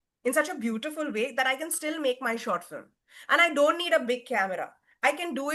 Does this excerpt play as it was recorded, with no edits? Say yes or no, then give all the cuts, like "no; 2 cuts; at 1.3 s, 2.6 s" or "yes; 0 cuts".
yes; 0 cuts